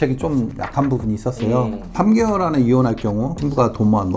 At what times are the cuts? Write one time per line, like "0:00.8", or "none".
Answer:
none